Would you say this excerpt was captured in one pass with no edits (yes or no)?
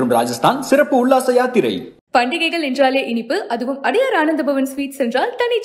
yes